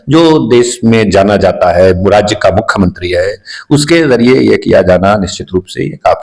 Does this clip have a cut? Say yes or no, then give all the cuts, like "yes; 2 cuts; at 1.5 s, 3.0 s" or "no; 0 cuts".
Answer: no; 0 cuts